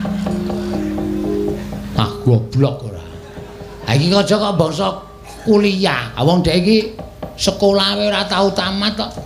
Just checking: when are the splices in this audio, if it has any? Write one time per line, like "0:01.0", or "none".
none